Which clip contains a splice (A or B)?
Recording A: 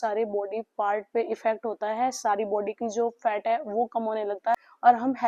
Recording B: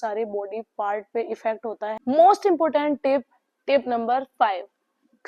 B